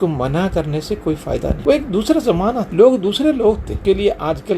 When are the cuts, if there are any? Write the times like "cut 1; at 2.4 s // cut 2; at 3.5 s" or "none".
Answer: cut 1; at 1.6 s // cut 2; at 2.7 s // cut 3; at 3.7 s